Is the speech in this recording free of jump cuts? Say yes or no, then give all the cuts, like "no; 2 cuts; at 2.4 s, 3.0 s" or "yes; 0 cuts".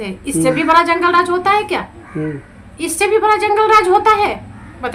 yes; 0 cuts